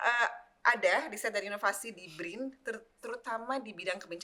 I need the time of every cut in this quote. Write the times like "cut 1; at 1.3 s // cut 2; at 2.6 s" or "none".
none